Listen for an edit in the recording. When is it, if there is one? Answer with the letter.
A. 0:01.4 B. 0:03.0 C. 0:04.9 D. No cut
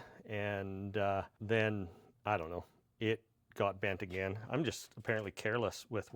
A